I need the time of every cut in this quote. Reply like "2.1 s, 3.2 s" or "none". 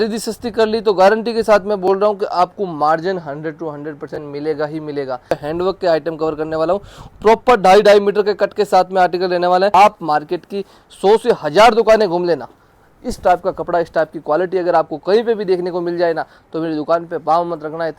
5.3 s, 9.7 s